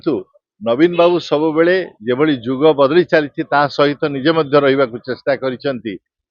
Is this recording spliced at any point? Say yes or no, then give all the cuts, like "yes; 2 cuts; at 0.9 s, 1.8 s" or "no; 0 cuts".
no; 0 cuts